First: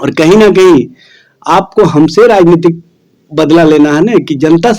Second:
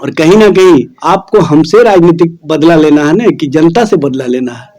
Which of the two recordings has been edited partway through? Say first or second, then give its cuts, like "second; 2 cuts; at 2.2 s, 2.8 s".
second; 2 cuts; at 0.9 s, 2.4 s